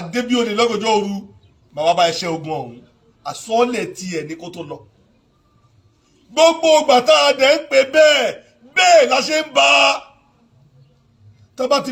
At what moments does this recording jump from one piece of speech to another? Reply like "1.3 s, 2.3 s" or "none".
none